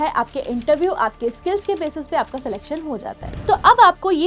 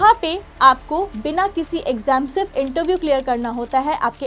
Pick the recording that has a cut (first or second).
first